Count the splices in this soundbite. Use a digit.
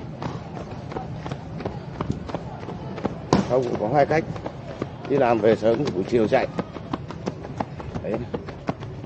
0